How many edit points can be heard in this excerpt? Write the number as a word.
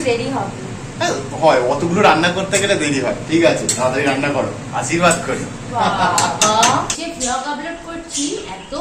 one